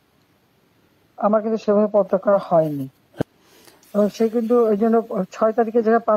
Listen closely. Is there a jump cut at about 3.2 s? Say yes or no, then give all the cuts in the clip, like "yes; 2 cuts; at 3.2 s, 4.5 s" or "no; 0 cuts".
yes; 1 cut; at 3.2 s